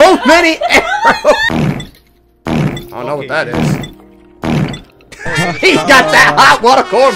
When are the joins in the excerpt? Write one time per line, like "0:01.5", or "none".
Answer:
none